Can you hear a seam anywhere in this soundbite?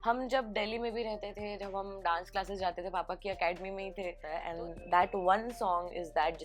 yes; 1 cut; at 4.4 s

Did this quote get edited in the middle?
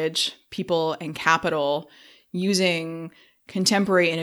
no; 0 cuts

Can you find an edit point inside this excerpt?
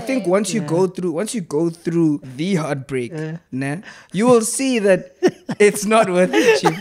yes; 1 cut; at 2.3 s

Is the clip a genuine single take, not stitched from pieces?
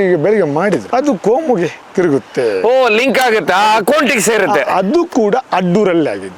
yes; 0 cuts

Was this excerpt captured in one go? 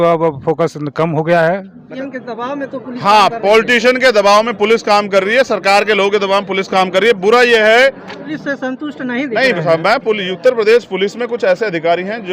no; 2 cuts; at 1.8 s, 8.3 s

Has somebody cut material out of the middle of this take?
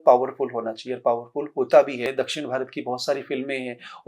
yes; 1 cut; at 2.1 s

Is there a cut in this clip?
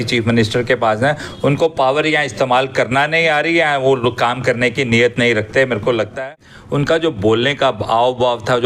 yes; 1 cut; at 6.2 s

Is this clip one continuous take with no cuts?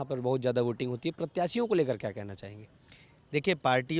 yes; 0 cuts

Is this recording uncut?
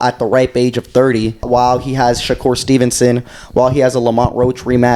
no; 1 cut; at 1.4 s

